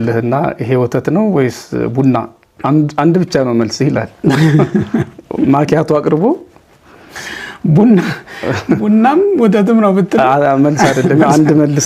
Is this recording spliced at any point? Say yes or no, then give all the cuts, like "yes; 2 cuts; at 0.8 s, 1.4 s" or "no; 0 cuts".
no; 0 cuts